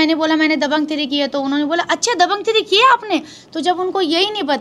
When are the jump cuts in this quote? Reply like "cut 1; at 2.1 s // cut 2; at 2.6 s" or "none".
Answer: none